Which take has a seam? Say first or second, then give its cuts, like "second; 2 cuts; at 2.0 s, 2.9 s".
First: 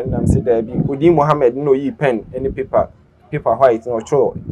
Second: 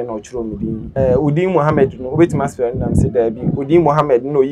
second; 1 cut; at 0.9 s